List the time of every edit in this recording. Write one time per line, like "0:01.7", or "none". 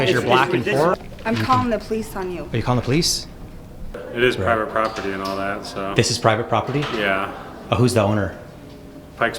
0:00.9
0:04.0